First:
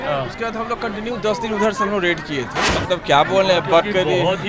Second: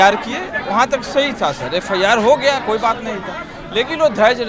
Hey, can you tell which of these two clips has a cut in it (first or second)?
first